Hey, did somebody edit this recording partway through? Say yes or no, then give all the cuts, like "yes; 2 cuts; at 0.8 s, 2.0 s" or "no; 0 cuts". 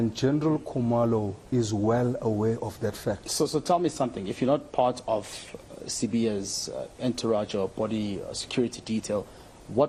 no; 0 cuts